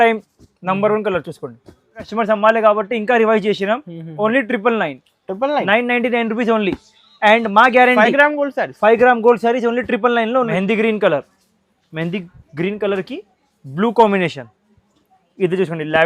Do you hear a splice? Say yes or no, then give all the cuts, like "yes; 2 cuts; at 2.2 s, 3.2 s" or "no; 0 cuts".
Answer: yes; 2 cuts; at 2.1 s, 10.5 s